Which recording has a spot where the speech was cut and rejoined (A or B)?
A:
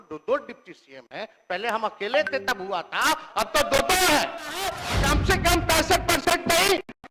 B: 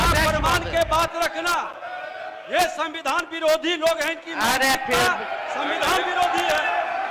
A